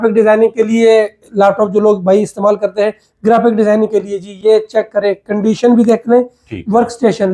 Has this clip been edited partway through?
no; 0 cuts

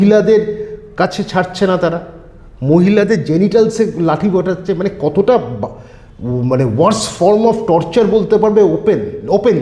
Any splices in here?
no; 0 cuts

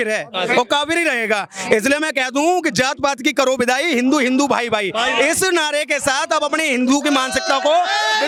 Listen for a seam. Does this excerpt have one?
no; 0 cuts

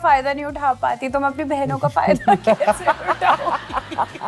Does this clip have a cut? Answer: no; 0 cuts

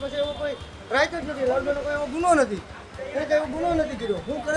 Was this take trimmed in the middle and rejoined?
no; 0 cuts

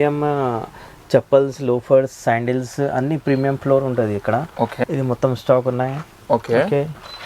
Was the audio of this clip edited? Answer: no; 0 cuts

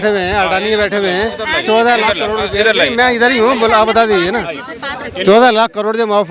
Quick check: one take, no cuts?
yes; 0 cuts

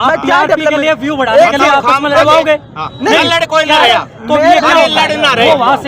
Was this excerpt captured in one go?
yes; 0 cuts

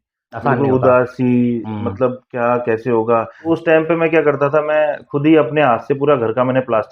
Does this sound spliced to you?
yes; 1 cut; at 3.5 s

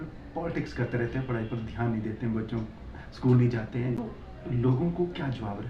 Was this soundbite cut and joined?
yes; 1 cut; at 4.0 s

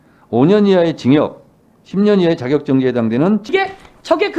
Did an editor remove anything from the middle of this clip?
yes; 1 cut; at 3.4 s

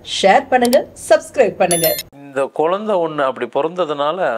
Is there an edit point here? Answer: yes; 1 cut; at 2.1 s

